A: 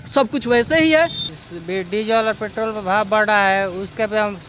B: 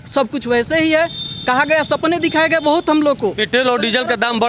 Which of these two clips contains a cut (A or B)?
A